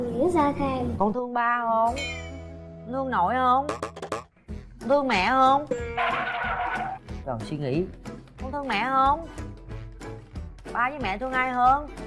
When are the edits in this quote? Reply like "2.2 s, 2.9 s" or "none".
none